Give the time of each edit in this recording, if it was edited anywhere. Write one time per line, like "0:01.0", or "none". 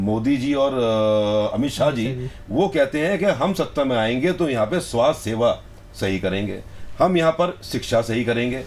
none